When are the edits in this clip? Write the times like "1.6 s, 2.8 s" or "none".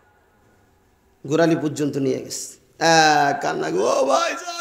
none